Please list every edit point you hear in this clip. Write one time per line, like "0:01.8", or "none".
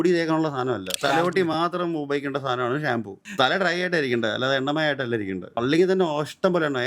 0:01.0
0:03.2
0:05.6